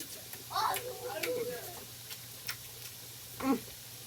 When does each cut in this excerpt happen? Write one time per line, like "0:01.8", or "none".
none

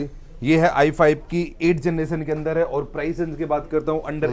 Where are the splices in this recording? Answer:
none

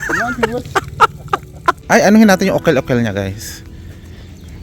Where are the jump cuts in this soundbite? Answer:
0:01.8

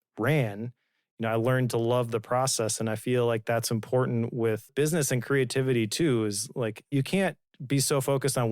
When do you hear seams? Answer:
0:04.7
0:06.9

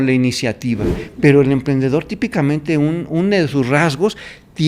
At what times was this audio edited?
0:01.0

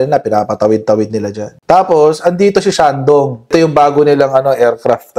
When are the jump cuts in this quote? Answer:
0:03.5

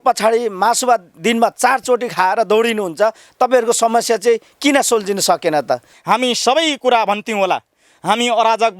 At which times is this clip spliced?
0:05.9

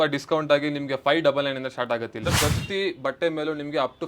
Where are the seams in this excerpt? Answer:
0:02.3

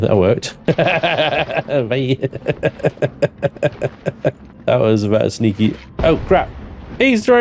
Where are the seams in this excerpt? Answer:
0:04.5

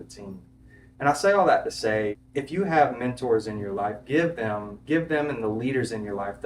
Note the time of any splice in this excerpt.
0:02.2

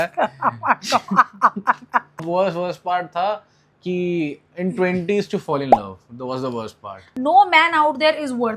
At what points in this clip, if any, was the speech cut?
0:02.2
0:07.0

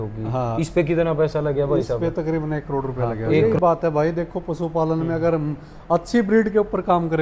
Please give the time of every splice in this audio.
0:03.4

